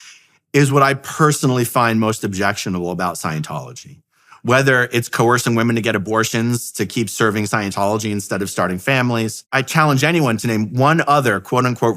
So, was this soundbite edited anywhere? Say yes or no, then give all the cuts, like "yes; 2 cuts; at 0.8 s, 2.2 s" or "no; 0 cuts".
yes; 1 cut; at 9.5 s